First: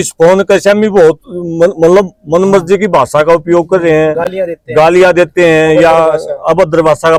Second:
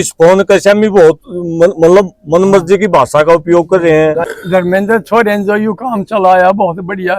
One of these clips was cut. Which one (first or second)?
second